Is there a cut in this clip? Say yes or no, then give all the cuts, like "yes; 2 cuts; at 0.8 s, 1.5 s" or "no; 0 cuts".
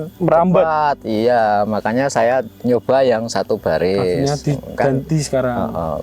no; 0 cuts